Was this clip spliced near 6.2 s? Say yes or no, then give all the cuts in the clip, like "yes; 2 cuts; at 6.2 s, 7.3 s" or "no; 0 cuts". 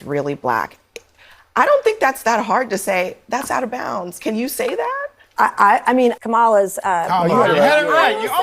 yes; 1 cut; at 6.2 s